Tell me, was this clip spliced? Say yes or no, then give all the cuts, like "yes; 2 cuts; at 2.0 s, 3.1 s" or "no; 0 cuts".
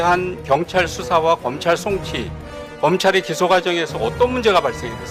no; 0 cuts